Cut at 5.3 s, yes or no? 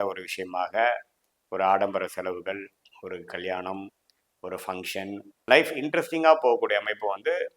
yes